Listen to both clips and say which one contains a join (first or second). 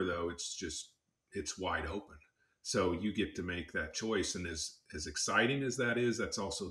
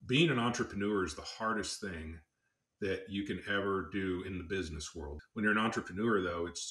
second